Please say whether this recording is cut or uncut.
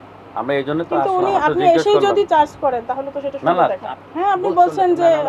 uncut